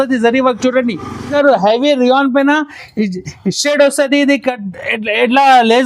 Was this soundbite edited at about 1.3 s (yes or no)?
yes